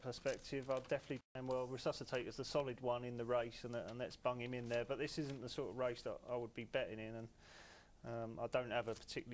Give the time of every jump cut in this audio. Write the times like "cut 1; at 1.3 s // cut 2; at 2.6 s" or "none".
cut 1; at 1.4 s